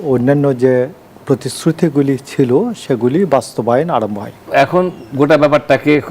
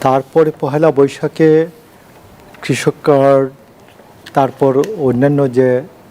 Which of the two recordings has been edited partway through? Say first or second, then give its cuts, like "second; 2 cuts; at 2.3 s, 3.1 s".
first; 1 cut; at 4.3 s